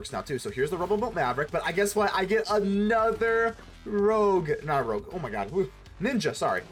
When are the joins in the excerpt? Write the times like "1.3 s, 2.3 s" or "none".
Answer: none

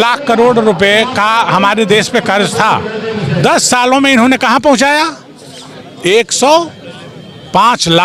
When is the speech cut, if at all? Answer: none

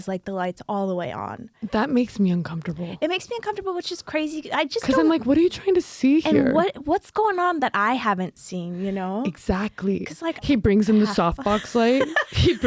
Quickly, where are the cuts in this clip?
1.6 s, 10.5 s

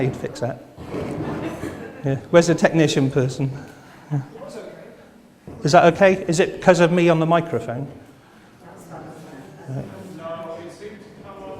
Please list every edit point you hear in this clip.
5.6 s

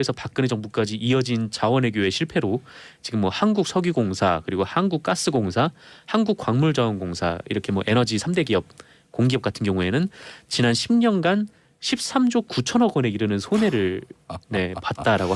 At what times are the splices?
5.7 s

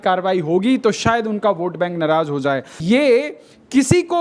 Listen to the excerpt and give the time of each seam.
2.8 s

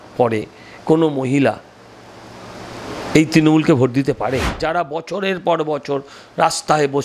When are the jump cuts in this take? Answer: 4.5 s

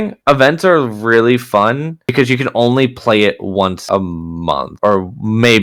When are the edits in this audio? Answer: none

